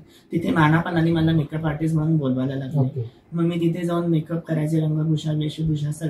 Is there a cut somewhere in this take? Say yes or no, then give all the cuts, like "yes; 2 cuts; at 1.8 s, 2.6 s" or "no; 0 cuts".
no; 0 cuts